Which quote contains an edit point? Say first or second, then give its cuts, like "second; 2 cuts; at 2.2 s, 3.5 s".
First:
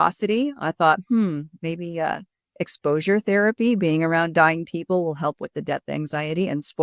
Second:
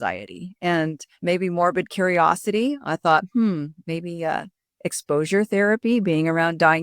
second; 1 cut; at 1.1 s